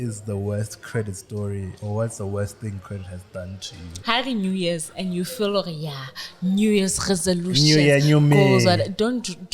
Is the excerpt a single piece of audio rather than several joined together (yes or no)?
no